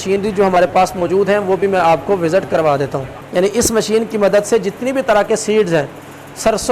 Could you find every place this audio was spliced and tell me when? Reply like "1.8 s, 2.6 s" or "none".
3.2 s

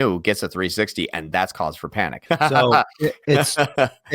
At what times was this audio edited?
2.2 s

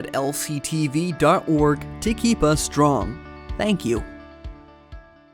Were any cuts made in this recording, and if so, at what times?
4.0 s

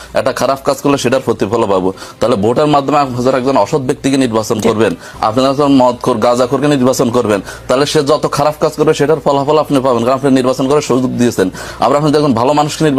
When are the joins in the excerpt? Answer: none

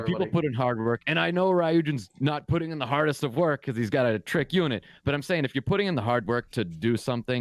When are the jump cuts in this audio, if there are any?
none

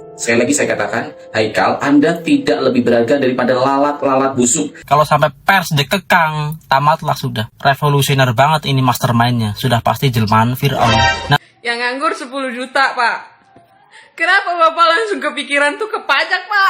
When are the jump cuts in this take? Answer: 4.8 s, 11.4 s

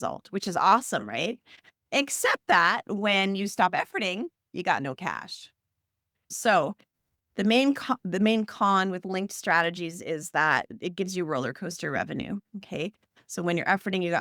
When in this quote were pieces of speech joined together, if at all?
6.3 s

